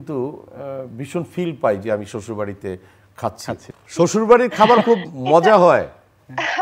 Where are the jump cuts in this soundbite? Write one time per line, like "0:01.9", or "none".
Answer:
0:03.7